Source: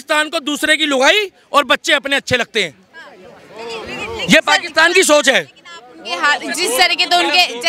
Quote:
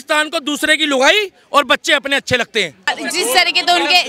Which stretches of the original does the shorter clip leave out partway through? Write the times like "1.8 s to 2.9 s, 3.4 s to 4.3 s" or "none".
2.9 s to 6.3 s